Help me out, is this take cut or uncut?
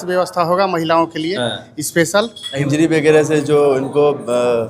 cut